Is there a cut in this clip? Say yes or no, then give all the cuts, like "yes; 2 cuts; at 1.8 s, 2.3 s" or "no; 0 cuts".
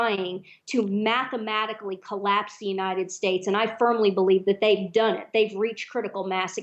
no; 0 cuts